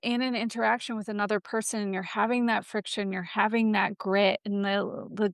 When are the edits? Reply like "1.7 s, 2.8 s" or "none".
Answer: none